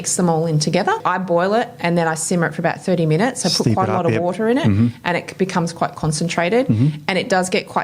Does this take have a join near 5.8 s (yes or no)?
no